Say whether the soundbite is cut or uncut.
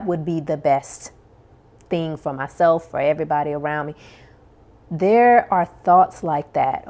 uncut